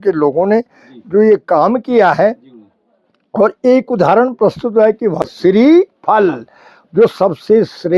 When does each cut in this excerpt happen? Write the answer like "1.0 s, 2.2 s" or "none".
5.2 s